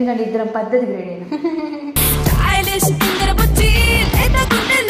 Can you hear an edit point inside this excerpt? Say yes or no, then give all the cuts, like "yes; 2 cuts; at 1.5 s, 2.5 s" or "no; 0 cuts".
no; 0 cuts